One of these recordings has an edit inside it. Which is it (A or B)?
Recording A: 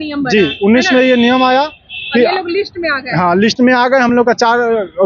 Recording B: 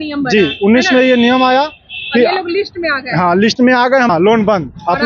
B